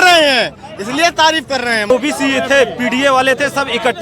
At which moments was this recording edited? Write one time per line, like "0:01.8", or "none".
0:01.9